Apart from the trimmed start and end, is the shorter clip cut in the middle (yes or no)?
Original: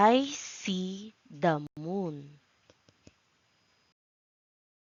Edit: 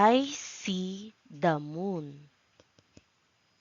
yes